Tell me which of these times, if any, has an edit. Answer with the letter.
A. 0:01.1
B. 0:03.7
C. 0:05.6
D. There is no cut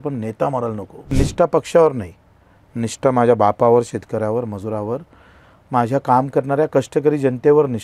A